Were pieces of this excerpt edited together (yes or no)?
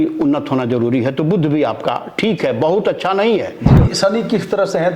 yes